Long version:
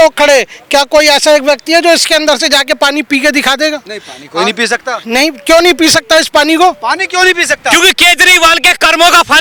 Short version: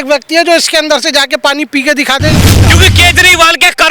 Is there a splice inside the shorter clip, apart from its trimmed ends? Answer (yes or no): yes